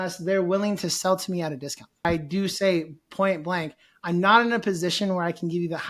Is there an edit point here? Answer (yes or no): yes